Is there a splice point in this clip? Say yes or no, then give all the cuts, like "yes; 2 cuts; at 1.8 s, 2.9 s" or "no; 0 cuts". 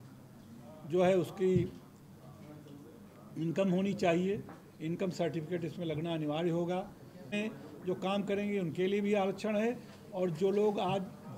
yes; 1 cut; at 7.3 s